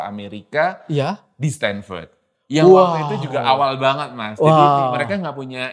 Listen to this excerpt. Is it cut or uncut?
uncut